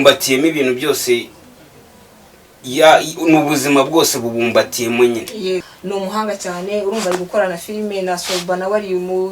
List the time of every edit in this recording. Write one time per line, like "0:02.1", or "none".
0:05.7